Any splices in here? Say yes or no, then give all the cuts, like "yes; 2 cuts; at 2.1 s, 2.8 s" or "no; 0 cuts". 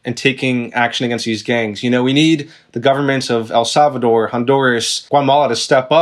yes; 1 cut; at 4.9 s